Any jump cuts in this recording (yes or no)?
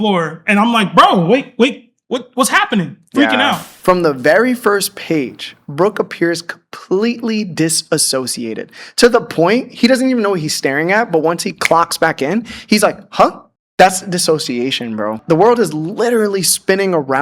yes